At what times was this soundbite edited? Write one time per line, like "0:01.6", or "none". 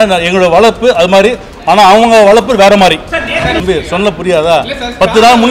0:03.6